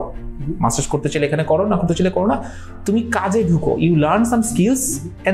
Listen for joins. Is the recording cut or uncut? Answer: uncut